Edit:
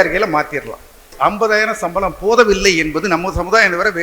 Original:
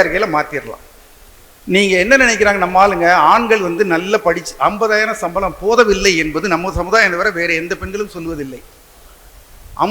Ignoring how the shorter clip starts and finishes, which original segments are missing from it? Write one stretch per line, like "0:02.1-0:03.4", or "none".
0:01.1-0:04.5